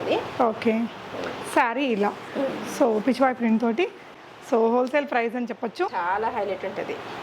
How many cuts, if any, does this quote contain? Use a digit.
2